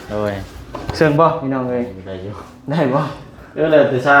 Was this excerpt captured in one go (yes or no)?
no